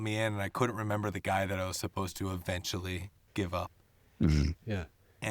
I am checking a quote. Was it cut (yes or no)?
yes